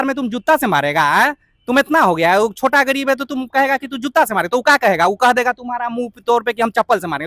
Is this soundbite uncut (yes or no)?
yes